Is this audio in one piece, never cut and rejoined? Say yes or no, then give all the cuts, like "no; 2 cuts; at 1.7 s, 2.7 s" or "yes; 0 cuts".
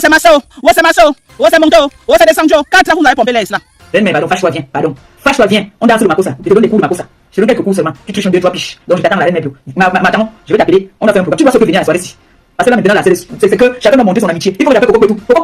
no; 1 cut; at 3.8 s